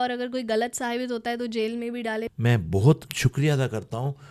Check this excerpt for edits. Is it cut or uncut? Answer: cut